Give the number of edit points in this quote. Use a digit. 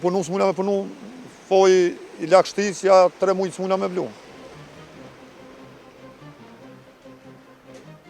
1